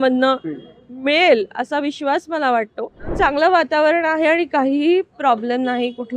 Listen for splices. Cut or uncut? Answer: cut